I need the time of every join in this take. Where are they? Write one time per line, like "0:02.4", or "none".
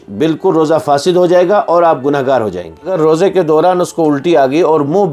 0:02.9